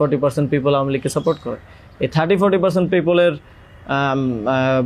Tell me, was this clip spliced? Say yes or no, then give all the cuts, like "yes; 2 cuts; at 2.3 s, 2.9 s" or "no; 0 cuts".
no; 0 cuts